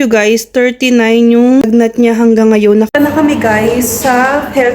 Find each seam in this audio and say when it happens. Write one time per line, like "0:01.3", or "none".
0:01.6
0:02.9